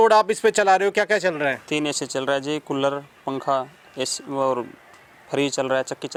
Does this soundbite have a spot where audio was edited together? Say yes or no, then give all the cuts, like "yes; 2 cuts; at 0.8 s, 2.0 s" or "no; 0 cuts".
no; 0 cuts